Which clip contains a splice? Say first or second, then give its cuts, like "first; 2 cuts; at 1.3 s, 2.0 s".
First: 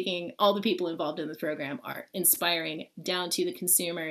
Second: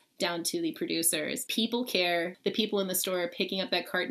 second; 2 cuts; at 1.4 s, 2.3 s